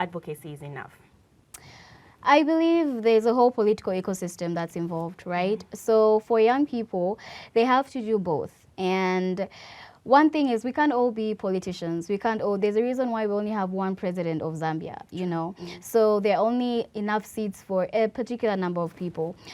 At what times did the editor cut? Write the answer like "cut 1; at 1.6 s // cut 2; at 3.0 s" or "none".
none